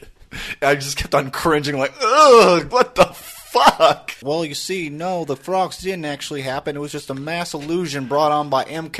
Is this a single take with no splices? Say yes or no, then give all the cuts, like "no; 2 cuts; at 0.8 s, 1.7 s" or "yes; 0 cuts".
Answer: no; 2 cuts; at 2.7 s, 4.2 s